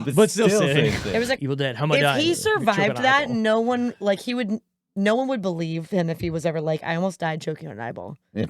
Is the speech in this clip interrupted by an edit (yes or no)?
yes